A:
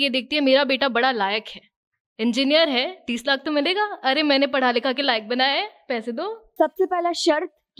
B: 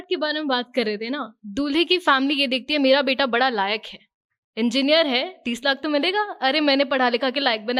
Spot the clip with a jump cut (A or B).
A